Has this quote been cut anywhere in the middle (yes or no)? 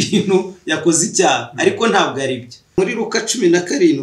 yes